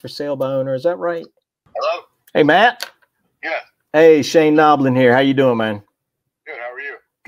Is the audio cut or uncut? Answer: cut